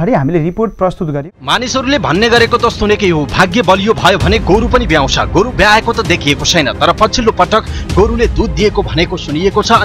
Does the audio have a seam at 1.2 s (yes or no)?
yes